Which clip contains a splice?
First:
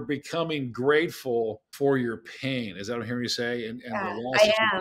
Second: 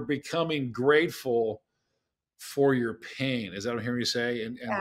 first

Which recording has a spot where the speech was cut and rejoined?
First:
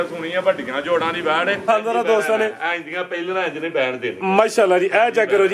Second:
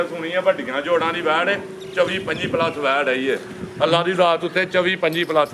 first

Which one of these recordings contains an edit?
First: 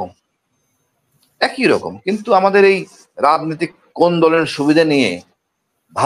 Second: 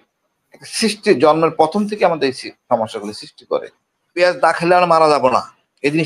second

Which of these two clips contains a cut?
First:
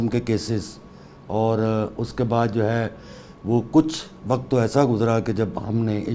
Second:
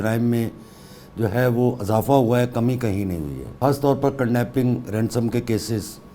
second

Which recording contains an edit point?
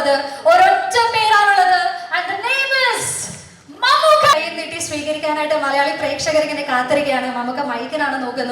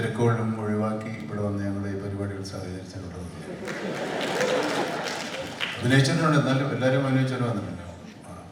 first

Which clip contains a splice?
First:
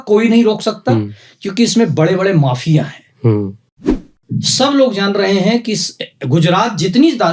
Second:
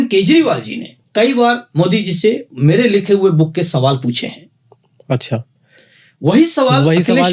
first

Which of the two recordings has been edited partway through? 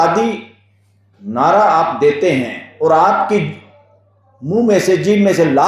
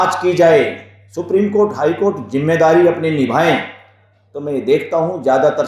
first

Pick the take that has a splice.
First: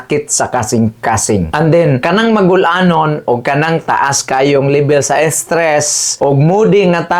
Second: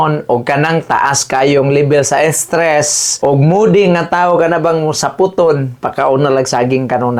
first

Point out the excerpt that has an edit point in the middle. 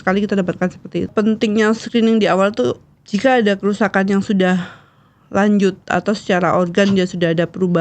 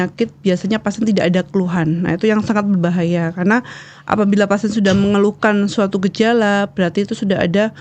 first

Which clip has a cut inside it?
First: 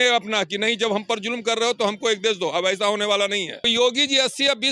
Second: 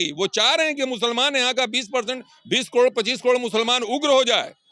first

